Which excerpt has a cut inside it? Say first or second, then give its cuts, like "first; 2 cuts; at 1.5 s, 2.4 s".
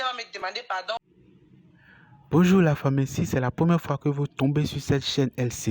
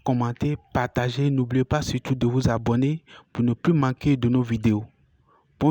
first; 1 cut; at 1.0 s